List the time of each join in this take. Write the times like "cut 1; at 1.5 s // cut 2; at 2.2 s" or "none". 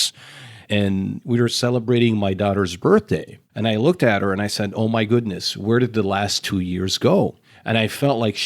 cut 1; at 3.5 s